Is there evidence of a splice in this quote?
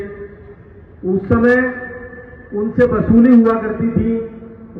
no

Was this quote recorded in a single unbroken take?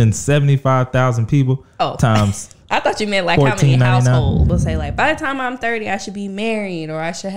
no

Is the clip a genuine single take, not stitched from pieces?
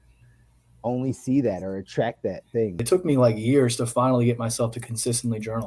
no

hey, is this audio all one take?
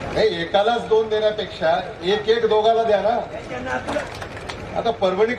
no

